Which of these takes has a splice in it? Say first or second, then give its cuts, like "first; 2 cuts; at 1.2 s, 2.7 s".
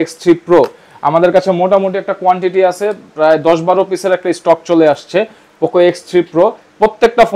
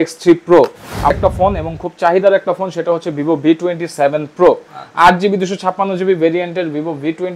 second; 1 cut; at 1.1 s